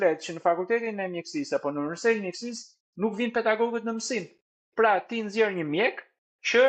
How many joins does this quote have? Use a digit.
0